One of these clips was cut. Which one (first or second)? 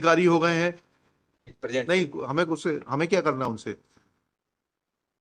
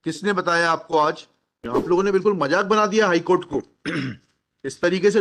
second